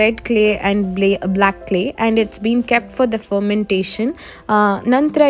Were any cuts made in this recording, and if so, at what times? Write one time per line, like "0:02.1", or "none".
none